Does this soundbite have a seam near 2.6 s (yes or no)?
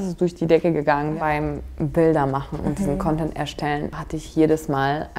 no